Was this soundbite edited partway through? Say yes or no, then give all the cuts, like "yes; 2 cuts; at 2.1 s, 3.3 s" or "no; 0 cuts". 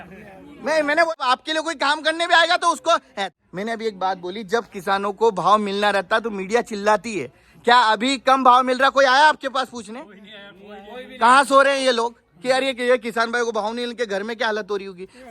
yes; 2 cuts; at 1.1 s, 3.3 s